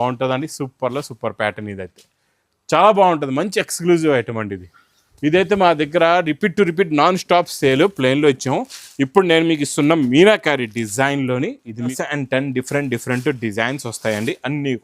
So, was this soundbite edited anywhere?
yes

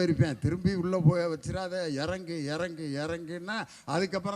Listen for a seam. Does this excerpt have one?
no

